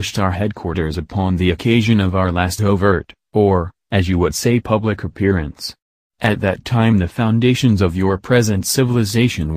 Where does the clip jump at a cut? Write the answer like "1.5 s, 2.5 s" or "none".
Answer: 4.4 s

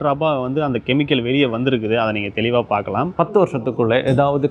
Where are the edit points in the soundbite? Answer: 3.1 s

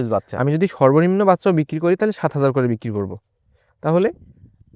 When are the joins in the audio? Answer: none

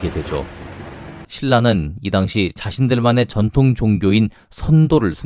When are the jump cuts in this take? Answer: 1.3 s

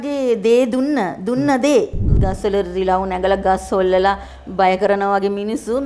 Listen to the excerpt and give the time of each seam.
2.1 s

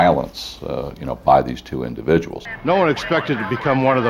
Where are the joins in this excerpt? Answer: 2.4 s

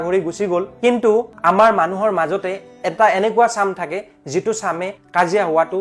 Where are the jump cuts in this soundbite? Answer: 1.3 s

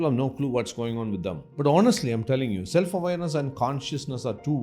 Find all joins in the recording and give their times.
1.4 s

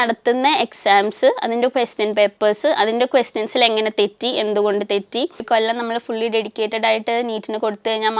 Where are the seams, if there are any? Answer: 5.4 s

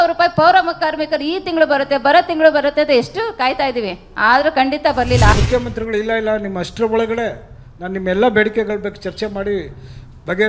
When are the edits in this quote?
5.3 s

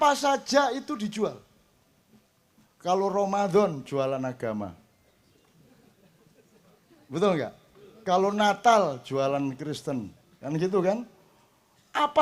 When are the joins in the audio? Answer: none

